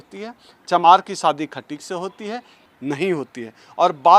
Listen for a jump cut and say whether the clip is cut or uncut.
cut